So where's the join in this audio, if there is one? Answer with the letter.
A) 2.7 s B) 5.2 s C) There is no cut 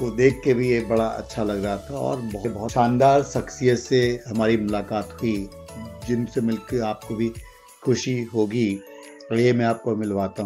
A